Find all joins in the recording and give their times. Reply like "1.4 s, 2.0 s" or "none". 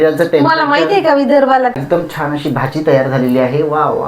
1.7 s